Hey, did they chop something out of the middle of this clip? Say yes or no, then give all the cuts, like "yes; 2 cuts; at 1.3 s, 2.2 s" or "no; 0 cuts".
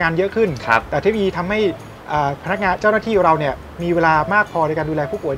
no; 0 cuts